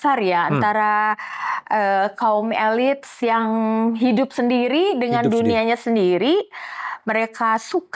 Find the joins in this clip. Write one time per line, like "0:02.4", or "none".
none